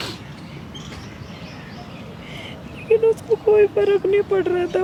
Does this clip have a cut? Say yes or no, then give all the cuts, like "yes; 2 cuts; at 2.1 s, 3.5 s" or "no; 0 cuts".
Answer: no; 0 cuts